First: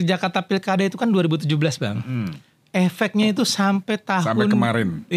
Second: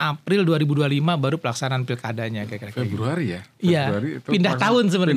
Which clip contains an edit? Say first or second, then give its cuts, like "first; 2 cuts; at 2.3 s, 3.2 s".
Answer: second; 1 cut; at 2.6 s